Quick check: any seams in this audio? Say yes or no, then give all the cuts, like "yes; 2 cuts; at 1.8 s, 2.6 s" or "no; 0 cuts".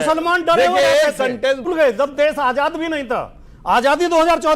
yes; 1 cut; at 1.6 s